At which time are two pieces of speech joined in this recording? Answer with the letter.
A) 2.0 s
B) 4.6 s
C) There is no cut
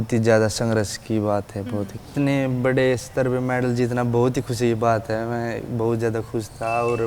A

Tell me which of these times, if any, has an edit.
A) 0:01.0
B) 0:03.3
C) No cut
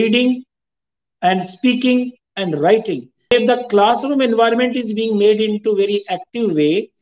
B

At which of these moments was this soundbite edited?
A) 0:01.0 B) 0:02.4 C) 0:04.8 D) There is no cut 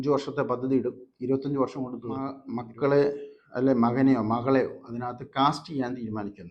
B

